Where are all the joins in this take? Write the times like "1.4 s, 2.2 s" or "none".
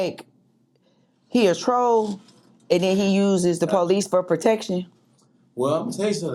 none